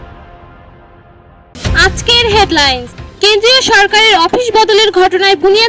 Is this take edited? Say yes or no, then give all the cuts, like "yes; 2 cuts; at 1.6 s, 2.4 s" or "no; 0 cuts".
yes; 1 cut; at 1.5 s